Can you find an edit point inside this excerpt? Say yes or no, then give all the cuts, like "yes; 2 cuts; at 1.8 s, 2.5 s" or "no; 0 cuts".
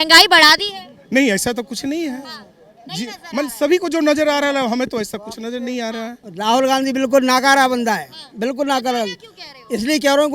yes; 1 cut; at 6.2 s